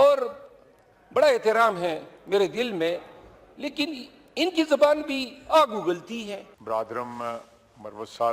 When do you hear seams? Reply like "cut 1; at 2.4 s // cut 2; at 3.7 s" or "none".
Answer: cut 1; at 6.5 s